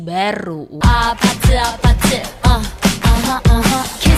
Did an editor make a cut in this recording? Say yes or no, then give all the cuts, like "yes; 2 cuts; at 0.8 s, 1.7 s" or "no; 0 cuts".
no; 0 cuts